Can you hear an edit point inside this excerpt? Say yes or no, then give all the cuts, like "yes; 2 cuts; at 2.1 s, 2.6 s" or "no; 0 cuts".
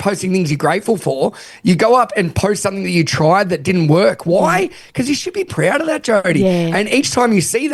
yes; 1 cut; at 5.5 s